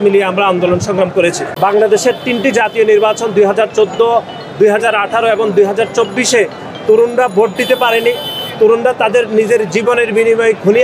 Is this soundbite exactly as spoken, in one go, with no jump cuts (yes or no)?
no